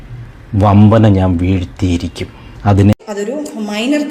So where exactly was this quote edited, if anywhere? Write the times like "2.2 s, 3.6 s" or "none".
3.0 s